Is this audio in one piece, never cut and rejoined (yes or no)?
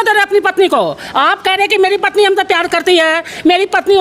yes